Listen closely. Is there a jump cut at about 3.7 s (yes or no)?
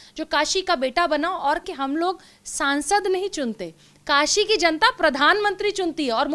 no